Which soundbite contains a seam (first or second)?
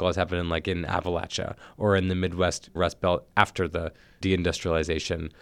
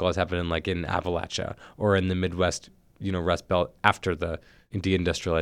first